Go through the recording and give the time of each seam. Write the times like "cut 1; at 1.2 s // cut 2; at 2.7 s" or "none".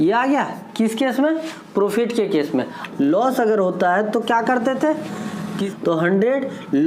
cut 1; at 2.8 s // cut 2; at 5.6 s